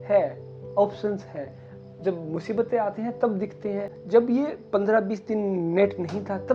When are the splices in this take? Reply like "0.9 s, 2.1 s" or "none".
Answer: 3.9 s